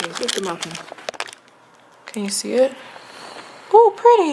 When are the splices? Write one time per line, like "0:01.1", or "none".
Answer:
none